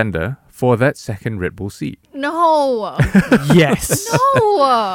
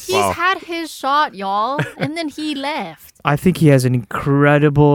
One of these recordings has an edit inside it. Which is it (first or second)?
second